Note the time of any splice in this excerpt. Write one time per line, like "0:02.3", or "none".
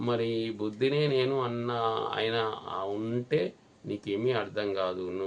none